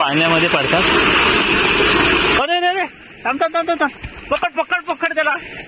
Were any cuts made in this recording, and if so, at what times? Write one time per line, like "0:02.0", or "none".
0:02.4